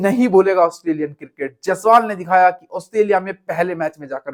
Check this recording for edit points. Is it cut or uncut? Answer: uncut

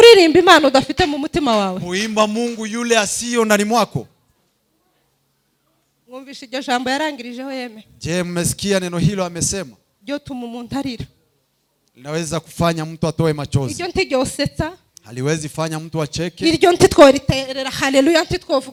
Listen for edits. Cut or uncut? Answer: uncut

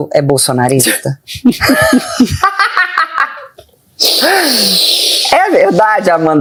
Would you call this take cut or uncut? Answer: uncut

